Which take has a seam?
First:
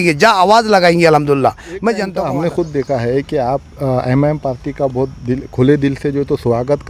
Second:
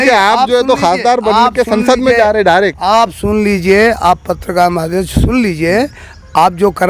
first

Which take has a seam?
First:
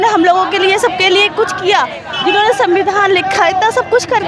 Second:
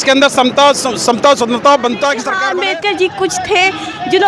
second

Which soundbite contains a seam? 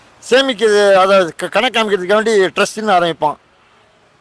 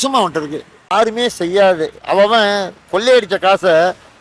second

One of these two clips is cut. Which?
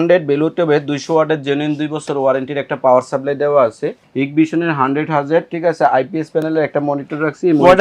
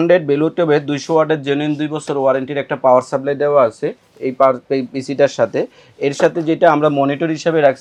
first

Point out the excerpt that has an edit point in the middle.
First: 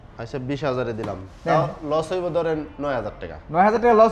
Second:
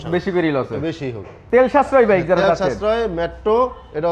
second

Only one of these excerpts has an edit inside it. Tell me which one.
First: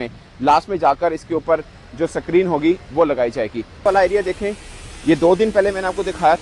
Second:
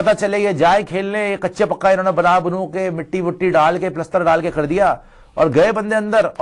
first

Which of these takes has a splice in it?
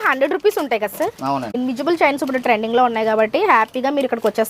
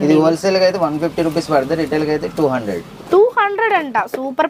first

